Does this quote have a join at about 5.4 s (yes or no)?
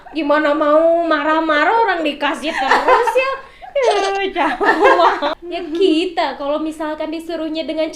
yes